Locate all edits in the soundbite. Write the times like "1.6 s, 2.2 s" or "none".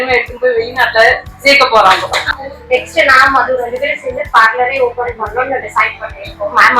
2.3 s